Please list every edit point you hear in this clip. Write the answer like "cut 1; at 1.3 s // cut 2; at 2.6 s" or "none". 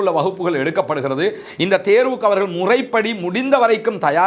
none

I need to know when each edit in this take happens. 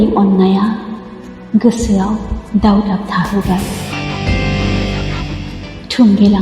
cut 1; at 3.8 s // cut 2; at 5.3 s

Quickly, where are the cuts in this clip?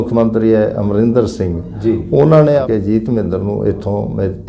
cut 1; at 2.6 s

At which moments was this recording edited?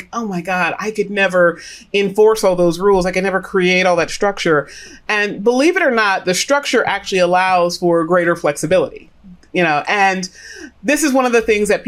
none

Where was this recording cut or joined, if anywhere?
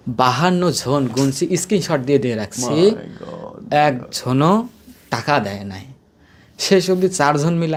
none

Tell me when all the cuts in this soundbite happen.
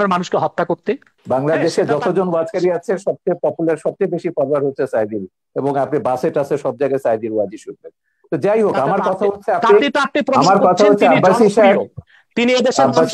cut 1; at 1.1 s

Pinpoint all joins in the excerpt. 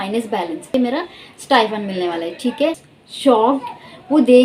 cut 1; at 0.7 s // cut 2; at 2.9 s

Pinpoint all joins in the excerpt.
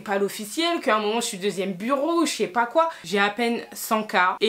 cut 1; at 3.0 s

